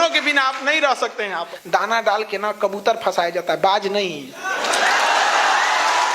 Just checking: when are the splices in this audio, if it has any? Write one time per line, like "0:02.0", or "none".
0:01.5